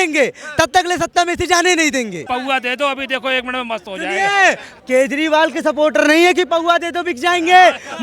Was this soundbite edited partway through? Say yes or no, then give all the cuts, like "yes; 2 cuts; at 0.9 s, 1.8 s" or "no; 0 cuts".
yes; 2 cuts; at 2.3 s, 4.7 s